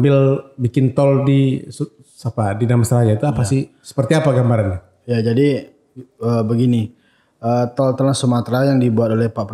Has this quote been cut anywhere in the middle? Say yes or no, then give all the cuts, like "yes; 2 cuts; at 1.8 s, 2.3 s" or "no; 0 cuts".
no; 0 cuts